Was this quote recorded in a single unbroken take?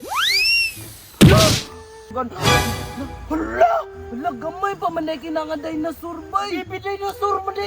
no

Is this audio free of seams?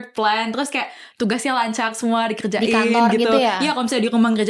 yes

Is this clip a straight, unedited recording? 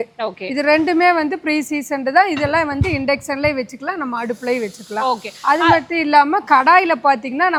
yes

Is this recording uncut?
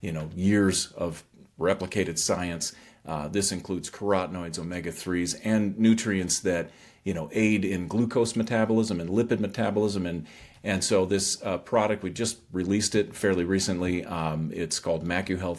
yes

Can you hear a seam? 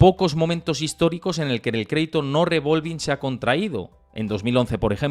no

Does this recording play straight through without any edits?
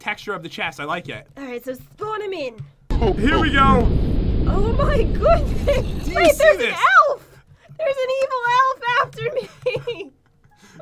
yes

